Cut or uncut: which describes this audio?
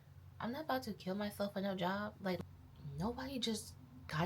cut